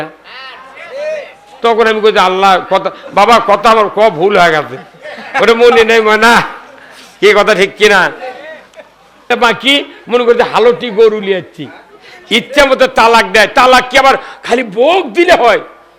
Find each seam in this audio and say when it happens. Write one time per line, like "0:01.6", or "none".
0:09.3